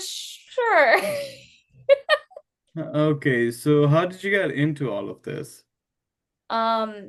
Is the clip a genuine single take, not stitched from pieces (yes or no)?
yes